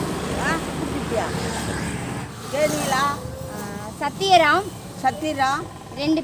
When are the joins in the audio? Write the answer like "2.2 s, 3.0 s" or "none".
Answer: 2.3 s